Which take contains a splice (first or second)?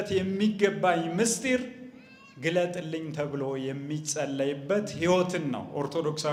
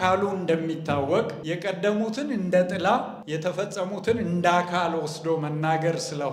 second